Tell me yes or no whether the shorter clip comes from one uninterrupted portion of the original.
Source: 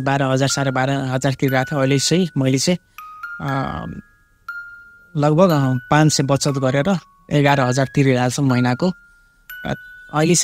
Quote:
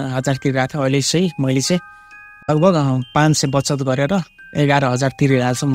no